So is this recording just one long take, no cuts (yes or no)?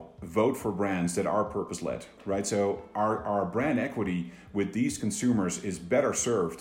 no